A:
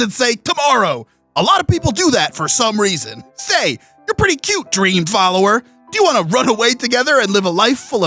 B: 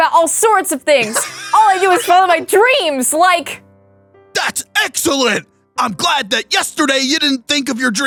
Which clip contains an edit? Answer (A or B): A